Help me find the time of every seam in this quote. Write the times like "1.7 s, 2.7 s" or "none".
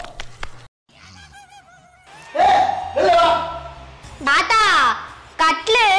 4.3 s